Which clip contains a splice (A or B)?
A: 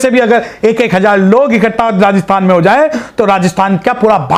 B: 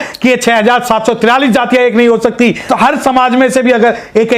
B